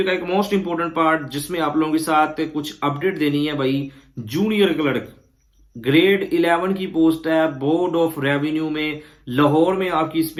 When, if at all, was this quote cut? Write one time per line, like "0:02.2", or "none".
none